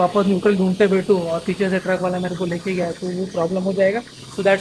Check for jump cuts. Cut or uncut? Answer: uncut